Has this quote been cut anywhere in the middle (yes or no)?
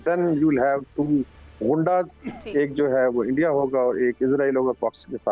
no